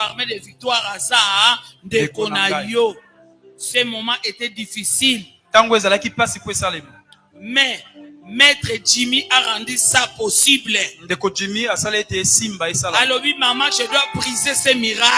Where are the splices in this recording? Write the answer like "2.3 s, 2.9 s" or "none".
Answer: none